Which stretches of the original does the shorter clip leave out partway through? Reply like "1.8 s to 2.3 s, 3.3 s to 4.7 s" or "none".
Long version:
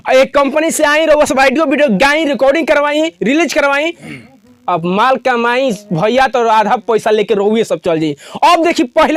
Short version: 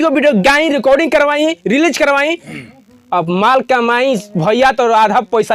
none

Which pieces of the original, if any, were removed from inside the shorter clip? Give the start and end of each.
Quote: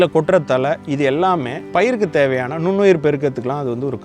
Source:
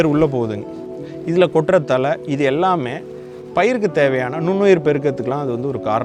3.0 s to 3.4 s

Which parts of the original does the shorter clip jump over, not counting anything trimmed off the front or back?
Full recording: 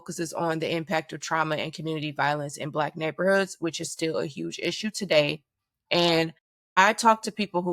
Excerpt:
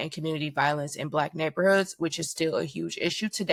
none

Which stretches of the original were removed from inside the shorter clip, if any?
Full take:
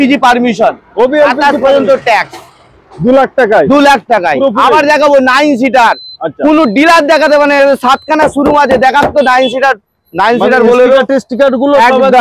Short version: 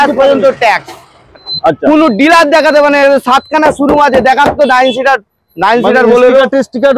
2.9 s to 6.0 s

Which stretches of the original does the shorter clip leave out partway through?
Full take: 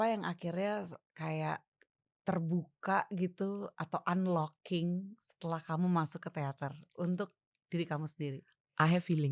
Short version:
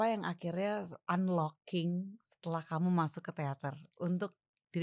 1.0 s to 4.0 s

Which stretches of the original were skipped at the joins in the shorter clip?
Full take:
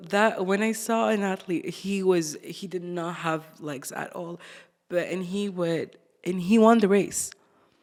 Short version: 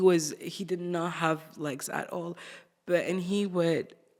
none

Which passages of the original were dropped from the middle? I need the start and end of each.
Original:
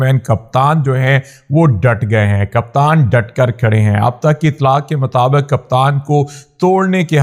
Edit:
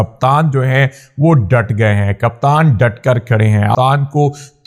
4.1 s to 5.7 s

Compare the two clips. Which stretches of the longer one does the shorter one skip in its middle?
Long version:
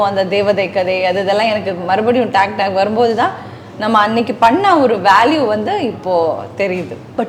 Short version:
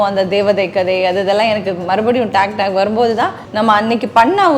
3.4 s to 3.7 s

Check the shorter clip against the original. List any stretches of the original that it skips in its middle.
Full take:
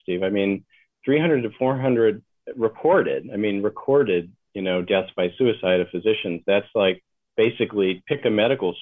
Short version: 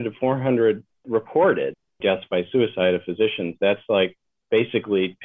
2.3 s to 2.4 s, 3.4 s to 4.8 s

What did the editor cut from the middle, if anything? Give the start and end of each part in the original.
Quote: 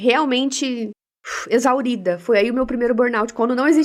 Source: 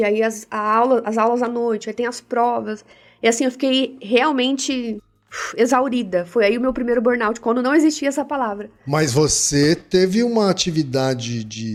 none

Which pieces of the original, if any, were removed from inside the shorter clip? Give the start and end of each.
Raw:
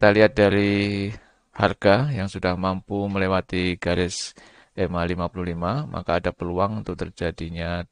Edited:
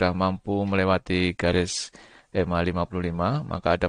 none

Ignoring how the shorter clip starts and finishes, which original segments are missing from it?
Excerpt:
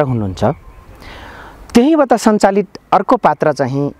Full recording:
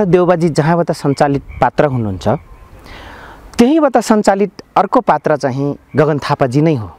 none

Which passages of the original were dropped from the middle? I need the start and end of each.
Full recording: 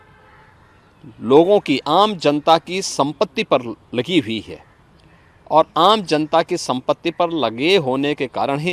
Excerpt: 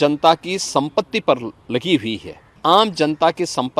4.8 s to 5.7 s

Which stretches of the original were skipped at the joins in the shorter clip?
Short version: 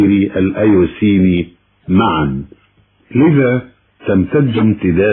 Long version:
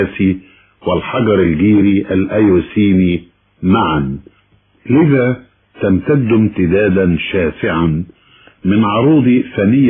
none

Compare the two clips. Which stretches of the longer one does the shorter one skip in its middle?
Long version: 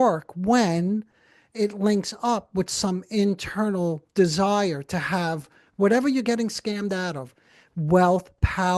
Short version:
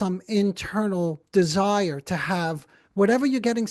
none

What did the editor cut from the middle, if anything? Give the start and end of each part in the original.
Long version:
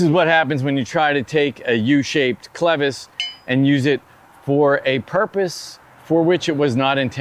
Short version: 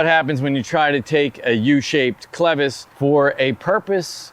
3.1 s to 4.3 s

